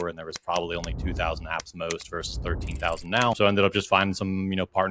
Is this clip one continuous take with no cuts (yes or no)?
no